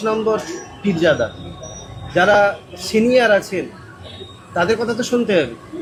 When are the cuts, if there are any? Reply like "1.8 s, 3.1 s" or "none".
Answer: none